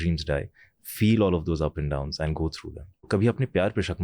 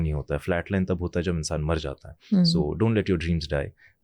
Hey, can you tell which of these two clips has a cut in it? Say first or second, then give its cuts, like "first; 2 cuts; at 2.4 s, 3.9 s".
first; 1 cut; at 3.1 s